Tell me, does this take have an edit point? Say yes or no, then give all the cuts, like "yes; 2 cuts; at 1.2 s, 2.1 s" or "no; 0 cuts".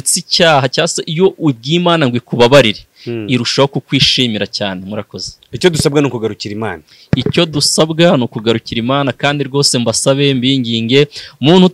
no; 0 cuts